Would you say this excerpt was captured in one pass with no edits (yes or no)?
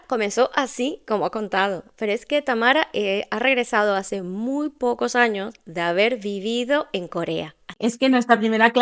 no